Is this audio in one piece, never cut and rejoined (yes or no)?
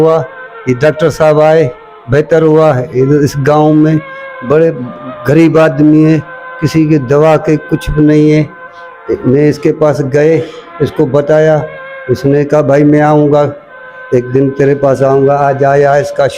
yes